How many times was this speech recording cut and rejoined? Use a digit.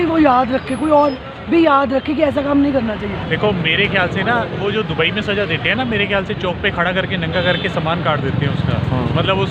1